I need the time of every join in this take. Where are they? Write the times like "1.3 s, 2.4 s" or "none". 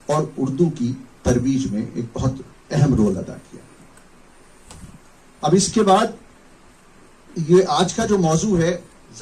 none

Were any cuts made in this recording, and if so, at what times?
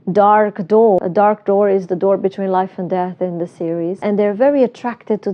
1.0 s, 4.0 s

